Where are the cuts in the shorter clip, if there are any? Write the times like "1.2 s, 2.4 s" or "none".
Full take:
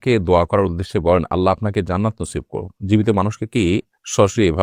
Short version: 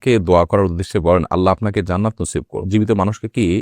2.6 s